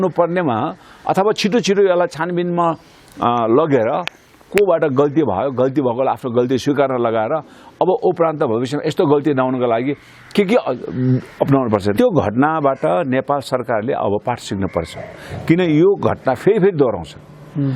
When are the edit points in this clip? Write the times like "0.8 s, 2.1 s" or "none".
11.9 s